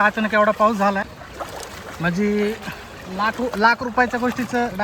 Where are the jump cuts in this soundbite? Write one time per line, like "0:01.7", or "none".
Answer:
0:01.0